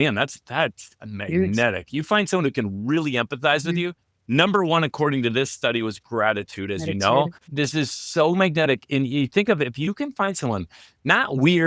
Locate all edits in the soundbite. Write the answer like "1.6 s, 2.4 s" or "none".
7.4 s